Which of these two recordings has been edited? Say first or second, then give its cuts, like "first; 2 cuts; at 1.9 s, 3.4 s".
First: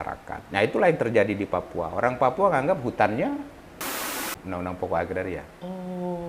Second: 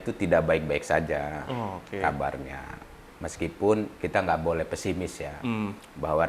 first; 1 cut; at 4.1 s